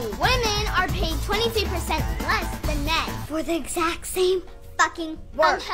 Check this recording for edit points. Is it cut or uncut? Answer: cut